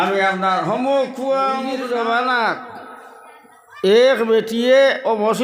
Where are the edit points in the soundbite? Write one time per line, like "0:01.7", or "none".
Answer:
0:01.7